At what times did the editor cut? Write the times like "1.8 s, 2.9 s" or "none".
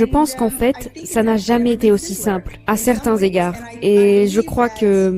none

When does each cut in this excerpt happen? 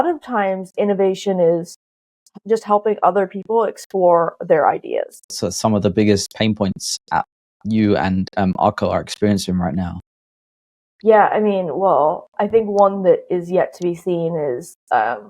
5.3 s

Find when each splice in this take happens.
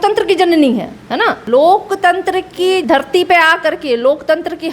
1.4 s, 2.8 s

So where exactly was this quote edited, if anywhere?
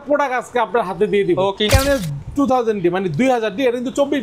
1.7 s

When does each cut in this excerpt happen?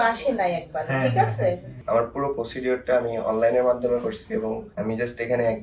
1.7 s, 4.7 s

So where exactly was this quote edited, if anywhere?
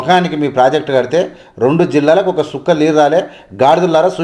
none

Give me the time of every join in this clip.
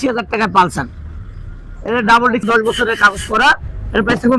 2.4 s

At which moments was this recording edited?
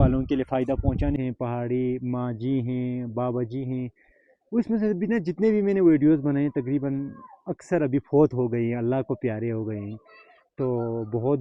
1.2 s

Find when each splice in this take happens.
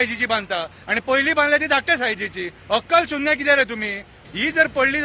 4.1 s

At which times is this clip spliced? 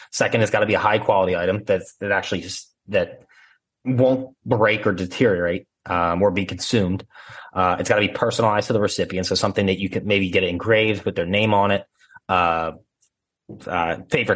none

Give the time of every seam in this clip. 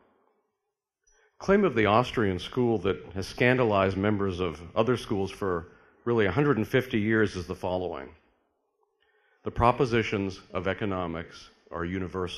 7.7 s

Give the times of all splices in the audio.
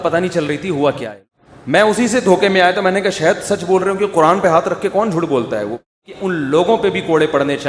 1.1 s, 5.9 s

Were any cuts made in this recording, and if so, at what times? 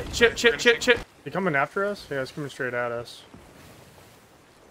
1.1 s

